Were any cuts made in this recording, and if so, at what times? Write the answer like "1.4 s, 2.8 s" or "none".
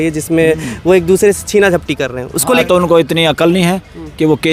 2.6 s